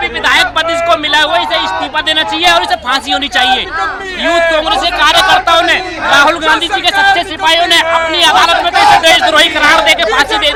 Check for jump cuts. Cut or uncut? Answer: uncut